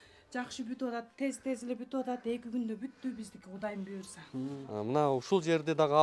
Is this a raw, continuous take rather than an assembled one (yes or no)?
no